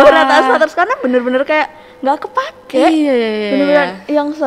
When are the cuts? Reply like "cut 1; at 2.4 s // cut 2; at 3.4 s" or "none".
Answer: none